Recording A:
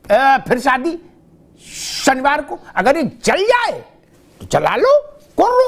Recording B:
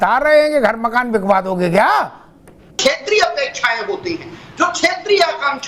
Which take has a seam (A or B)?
B